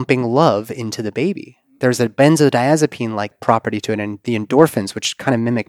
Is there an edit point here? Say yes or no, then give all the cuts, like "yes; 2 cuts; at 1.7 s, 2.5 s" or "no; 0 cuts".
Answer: yes; 1 cut; at 3.4 s